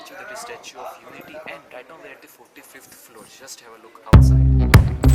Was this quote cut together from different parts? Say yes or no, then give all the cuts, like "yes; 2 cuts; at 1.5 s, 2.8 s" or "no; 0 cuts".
yes; 1 cut; at 4.1 s